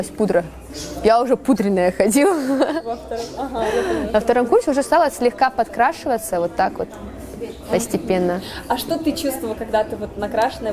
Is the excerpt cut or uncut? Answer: uncut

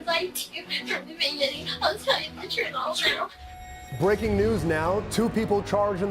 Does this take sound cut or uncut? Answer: cut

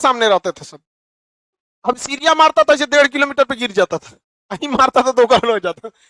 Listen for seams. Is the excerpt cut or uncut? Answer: uncut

